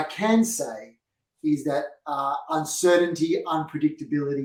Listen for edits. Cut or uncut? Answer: uncut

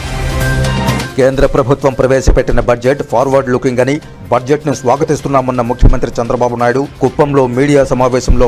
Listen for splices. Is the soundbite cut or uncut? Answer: cut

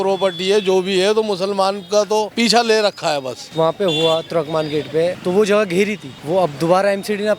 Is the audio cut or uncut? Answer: cut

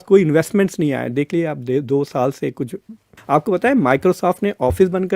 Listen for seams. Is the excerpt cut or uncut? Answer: cut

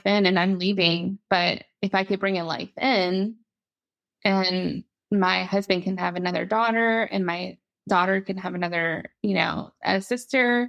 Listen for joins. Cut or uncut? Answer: uncut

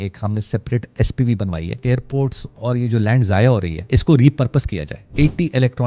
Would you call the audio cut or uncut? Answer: cut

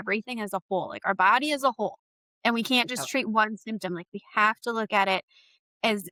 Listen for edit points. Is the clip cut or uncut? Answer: uncut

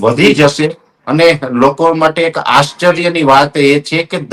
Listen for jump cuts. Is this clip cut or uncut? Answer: uncut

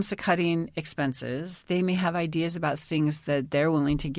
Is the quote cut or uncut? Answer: uncut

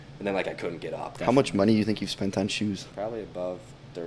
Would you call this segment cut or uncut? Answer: cut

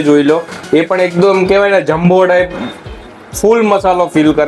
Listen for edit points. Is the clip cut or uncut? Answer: uncut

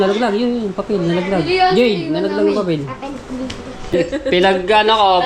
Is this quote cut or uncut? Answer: cut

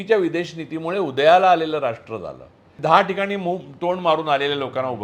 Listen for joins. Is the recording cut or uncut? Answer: cut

